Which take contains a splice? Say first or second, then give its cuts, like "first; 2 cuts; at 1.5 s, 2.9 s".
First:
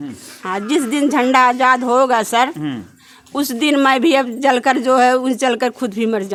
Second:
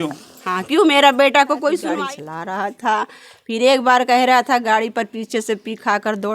second; 1 cut; at 1.8 s